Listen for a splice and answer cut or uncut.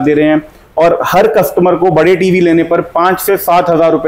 uncut